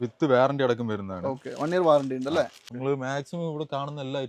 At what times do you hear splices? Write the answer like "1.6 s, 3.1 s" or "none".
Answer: 2.7 s

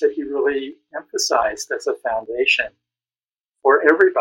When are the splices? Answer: none

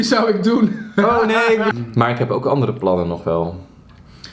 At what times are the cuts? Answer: 1.7 s

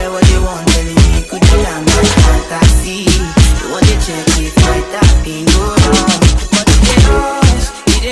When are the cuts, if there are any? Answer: none

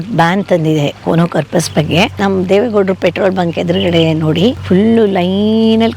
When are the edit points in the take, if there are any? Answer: 2.1 s, 4.6 s

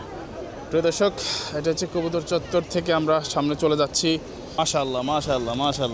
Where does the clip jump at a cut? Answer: 4.6 s

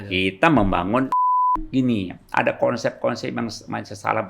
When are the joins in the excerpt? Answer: 1.5 s

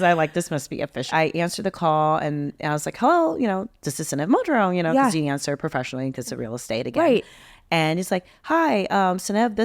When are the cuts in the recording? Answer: 1.1 s

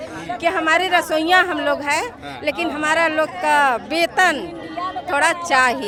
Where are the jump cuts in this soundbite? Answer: none

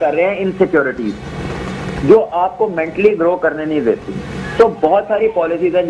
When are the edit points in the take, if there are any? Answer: none

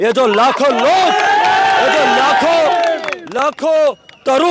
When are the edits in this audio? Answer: none

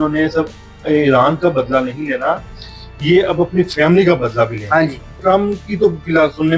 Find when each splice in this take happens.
5.1 s

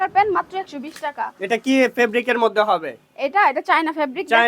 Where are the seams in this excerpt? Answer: 1.3 s

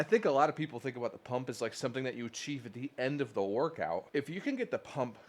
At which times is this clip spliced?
4.1 s

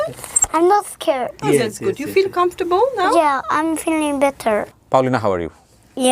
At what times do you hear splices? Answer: none

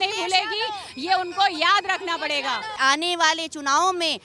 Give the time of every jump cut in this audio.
2.7 s

